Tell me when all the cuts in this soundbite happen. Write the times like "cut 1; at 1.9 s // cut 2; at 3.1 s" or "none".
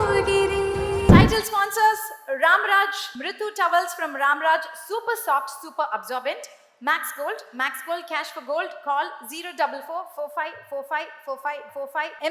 cut 1; at 1.1 s